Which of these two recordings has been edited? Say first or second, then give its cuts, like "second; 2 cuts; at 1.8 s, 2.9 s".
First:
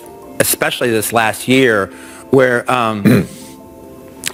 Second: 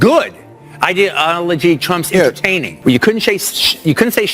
second; 1 cut; at 2.7 s